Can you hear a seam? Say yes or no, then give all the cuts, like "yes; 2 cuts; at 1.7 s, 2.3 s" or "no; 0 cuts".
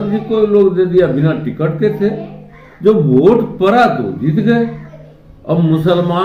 no; 0 cuts